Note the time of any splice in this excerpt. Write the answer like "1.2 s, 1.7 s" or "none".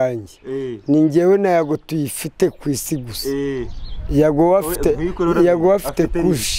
none